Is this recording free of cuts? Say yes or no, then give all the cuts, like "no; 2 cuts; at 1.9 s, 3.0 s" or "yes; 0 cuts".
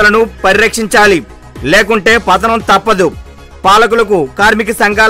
yes; 0 cuts